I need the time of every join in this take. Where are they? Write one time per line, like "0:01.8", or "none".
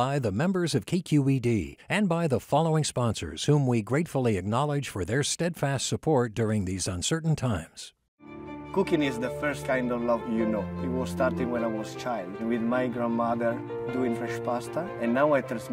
none